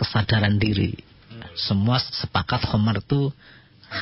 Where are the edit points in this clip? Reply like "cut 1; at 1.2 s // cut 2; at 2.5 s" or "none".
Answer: cut 1; at 1.5 s